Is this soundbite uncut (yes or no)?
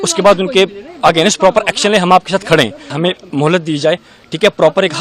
no